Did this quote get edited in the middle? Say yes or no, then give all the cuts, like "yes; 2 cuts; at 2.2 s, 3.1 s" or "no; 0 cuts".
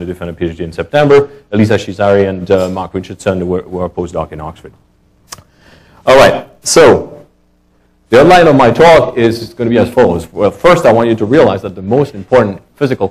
yes; 1 cut; at 10.4 s